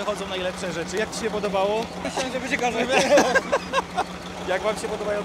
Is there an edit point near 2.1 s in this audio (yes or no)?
yes